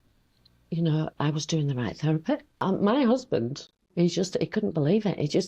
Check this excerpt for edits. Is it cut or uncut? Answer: cut